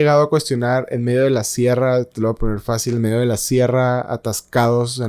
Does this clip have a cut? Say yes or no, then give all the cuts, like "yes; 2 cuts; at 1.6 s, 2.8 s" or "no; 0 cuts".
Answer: no; 0 cuts